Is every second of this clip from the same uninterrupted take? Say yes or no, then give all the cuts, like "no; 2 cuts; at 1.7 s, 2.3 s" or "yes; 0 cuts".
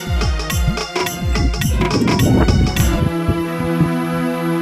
yes; 0 cuts